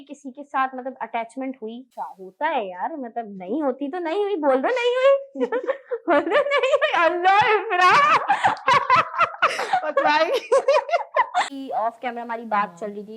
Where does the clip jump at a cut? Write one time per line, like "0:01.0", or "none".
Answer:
0:01.9
0:11.5

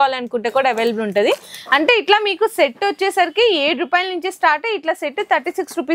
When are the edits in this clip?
none

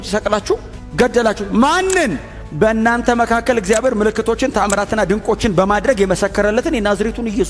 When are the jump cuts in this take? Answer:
0:01.4

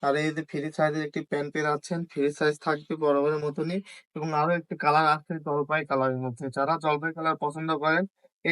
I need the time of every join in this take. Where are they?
none

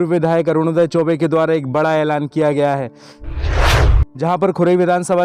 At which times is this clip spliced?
0:02.9
0:04.1

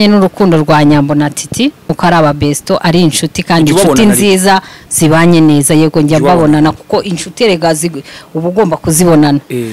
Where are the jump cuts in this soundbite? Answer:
0:02.0

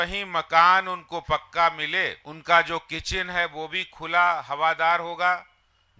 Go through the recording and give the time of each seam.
0:02.3

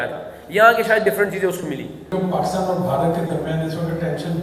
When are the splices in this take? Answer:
0:02.0

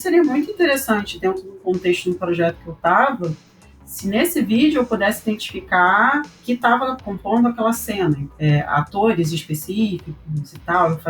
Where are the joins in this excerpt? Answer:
0:06.9
0:08.3

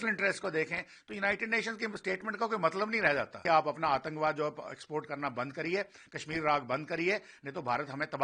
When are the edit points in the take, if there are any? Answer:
0:03.4

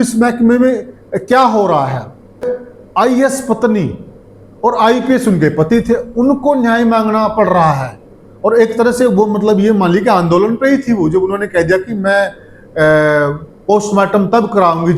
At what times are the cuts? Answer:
0:02.4

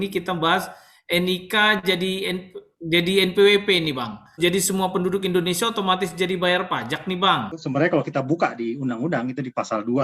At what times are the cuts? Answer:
0:04.4
0:07.6

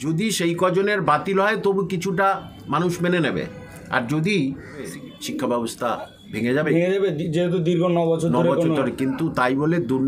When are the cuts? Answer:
0:04.9

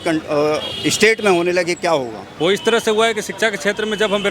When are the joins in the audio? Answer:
0:02.2

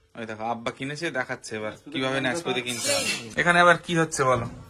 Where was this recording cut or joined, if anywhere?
0:03.2

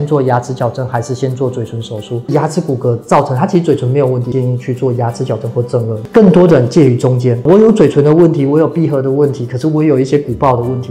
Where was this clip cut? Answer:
0:02.3
0:04.3
0:06.0
0:07.4

